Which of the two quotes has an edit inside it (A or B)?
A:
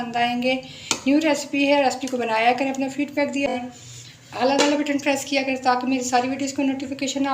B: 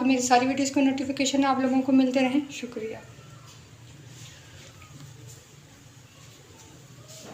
A